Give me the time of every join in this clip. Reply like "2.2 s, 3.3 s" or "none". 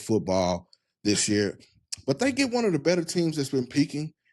none